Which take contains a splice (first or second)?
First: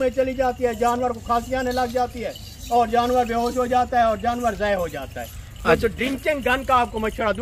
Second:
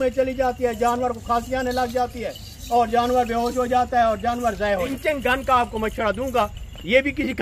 second